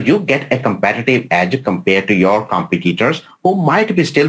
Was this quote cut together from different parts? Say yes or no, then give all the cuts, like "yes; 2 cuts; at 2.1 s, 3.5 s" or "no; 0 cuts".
no; 0 cuts